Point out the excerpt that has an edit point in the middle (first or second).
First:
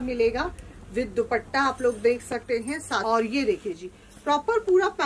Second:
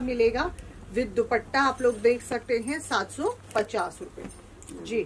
first